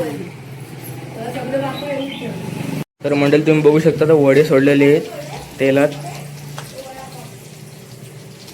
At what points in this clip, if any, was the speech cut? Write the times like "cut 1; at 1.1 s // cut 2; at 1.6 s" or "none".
cut 1; at 2.9 s